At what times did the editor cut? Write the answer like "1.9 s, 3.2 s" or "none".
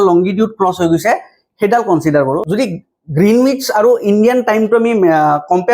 2.4 s